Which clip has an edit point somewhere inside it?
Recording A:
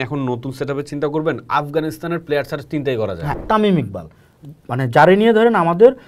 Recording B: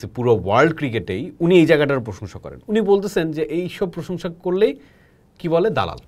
A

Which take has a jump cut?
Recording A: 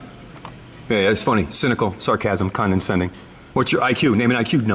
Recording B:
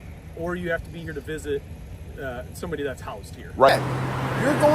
B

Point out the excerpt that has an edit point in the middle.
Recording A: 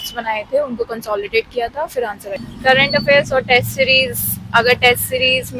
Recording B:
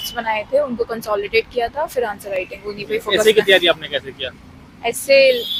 A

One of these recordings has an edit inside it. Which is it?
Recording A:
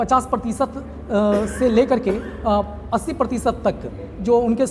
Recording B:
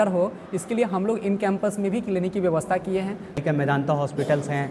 B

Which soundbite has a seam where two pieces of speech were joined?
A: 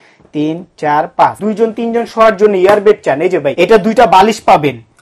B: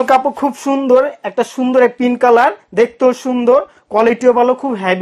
A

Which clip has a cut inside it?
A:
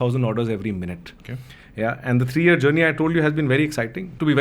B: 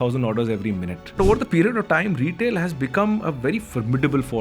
B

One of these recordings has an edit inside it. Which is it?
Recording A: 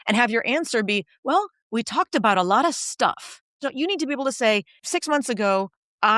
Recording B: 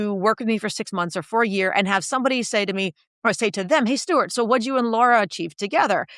A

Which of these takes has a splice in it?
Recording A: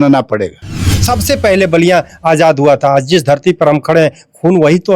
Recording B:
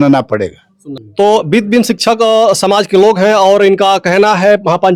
A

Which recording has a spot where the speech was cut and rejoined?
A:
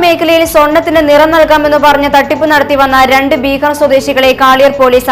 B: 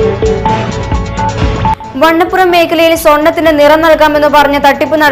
B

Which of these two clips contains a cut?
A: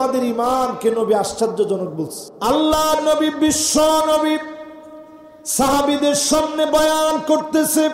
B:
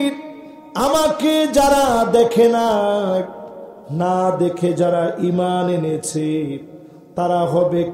A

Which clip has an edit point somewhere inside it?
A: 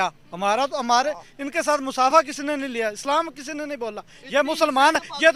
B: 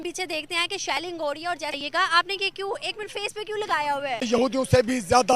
B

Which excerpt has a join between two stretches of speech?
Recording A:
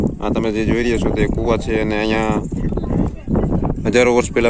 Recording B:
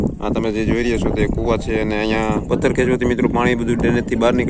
B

